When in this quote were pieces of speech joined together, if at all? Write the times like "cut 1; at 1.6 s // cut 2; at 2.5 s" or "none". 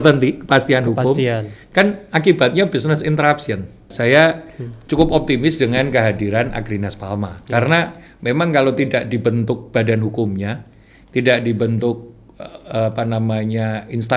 cut 1; at 3.9 s